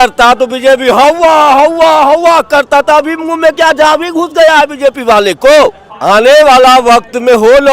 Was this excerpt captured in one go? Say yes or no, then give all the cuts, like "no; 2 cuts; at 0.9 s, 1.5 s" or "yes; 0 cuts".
no; 1 cut; at 5.9 s